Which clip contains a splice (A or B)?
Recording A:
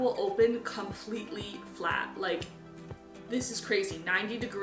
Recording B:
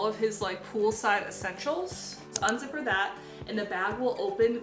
B